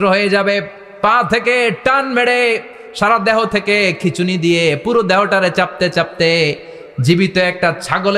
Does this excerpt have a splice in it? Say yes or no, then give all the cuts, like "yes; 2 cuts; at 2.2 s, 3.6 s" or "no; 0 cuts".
no; 0 cuts